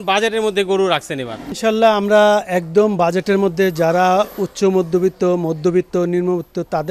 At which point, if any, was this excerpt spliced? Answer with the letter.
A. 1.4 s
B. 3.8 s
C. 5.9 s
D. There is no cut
D